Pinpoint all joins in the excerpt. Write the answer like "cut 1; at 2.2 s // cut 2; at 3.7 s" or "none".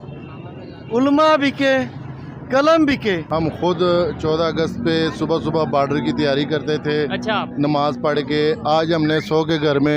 cut 1; at 3.2 s

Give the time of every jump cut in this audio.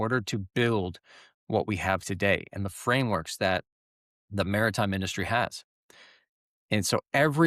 none

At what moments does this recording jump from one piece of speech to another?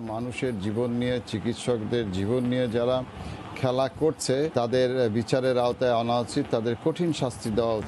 cut 1; at 4.5 s

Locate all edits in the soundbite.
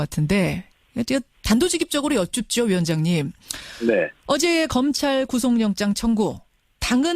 cut 1; at 3.0 s

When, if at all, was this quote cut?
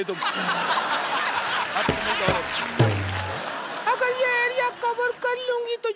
cut 1; at 3.2 s

